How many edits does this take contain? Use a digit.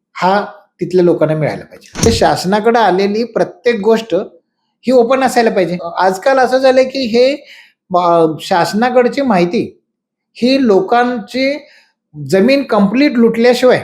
2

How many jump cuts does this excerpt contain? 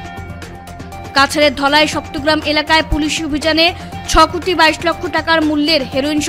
1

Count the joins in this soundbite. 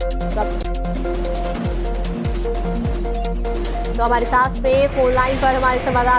1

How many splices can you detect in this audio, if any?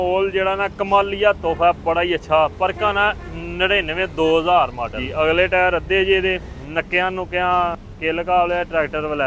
3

